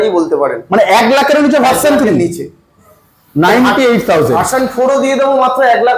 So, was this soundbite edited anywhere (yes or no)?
no